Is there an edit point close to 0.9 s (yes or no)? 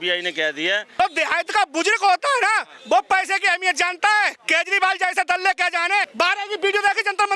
yes